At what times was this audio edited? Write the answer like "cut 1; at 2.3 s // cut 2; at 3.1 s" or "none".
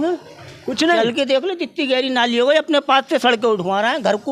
none